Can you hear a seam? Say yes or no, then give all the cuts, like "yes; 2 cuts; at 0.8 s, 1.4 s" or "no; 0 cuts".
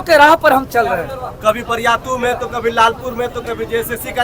no; 0 cuts